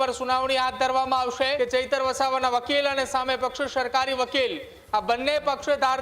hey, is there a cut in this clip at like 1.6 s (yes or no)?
yes